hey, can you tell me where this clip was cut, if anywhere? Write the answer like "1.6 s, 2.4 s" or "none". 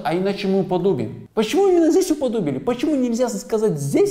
1.2 s